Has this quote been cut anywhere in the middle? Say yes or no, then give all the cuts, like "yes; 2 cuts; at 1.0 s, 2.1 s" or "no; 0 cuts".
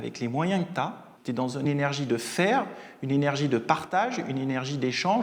yes; 1 cut; at 1.5 s